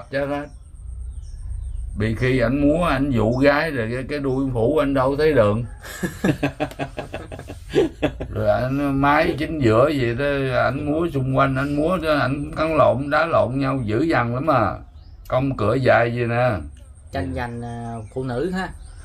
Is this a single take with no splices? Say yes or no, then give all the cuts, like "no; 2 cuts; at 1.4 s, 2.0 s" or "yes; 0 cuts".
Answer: yes; 0 cuts